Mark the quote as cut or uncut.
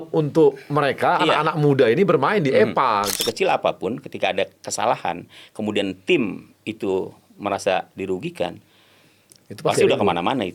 cut